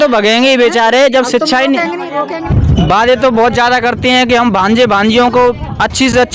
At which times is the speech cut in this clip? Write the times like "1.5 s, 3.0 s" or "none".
2.5 s